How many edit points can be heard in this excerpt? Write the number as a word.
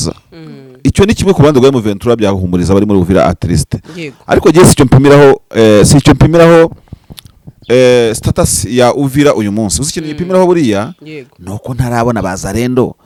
zero